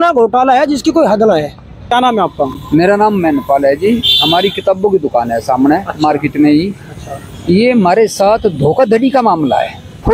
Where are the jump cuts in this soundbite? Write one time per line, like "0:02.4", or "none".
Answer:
0:01.9